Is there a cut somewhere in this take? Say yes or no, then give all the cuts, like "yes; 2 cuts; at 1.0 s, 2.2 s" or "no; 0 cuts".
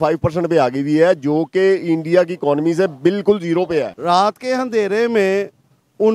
yes; 1 cut; at 3.9 s